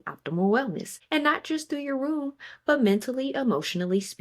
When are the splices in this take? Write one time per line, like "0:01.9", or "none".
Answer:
0:00.9

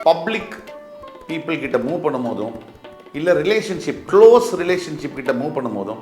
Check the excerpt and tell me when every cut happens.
none

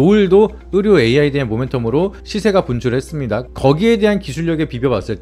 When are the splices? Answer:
none

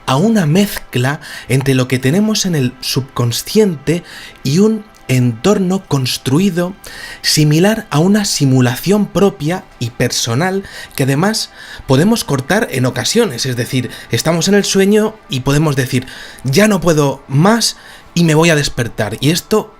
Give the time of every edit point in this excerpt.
0:17.5

